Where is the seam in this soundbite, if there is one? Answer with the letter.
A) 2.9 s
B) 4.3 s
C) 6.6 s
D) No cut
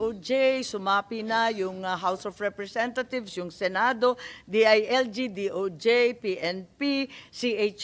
D